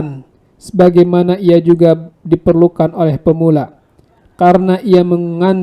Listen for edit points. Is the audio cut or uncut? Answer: uncut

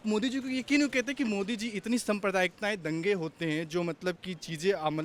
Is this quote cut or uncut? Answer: uncut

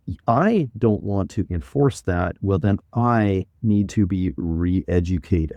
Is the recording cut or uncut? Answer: uncut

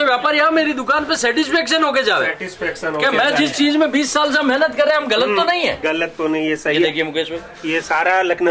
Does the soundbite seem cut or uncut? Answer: uncut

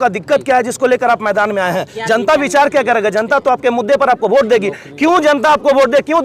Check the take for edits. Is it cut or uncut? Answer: uncut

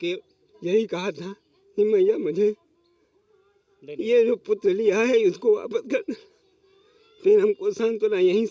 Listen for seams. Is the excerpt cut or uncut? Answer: uncut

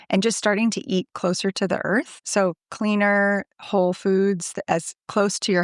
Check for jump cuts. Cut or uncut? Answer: cut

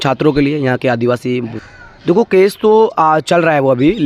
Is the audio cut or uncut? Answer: cut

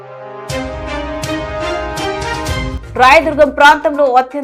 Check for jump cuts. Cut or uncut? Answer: cut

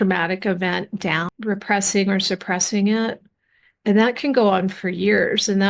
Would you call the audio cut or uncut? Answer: uncut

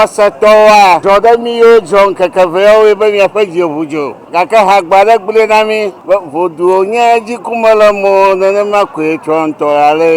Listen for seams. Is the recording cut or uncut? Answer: cut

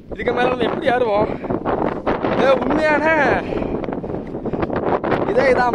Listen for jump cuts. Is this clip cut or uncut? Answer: uncut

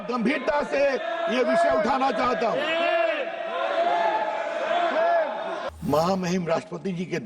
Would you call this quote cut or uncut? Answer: cut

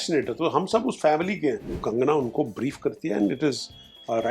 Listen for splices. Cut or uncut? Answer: cut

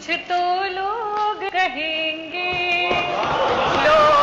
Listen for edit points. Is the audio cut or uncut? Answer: cut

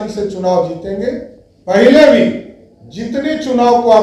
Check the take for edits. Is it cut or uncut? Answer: uncut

